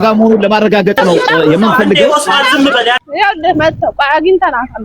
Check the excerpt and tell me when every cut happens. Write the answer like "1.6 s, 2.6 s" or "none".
3.0 s